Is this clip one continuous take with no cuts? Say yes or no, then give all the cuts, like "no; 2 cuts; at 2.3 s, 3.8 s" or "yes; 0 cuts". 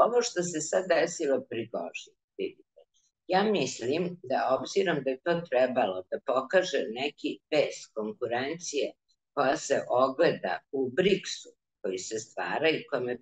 yes; 0 cuts